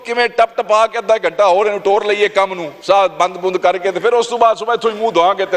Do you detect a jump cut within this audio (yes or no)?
no